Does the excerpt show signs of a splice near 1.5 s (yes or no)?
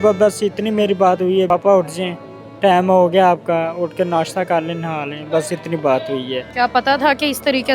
yes